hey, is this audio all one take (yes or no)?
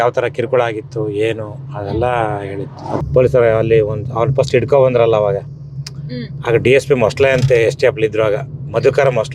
no